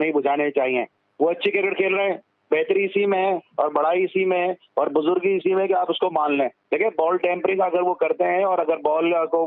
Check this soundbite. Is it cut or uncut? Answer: cut